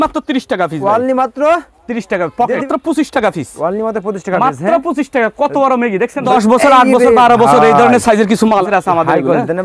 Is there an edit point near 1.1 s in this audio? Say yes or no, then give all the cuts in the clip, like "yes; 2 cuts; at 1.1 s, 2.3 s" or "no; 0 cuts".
no; 3 cuts; at 2.6 s, 6.3 s, 8.6 s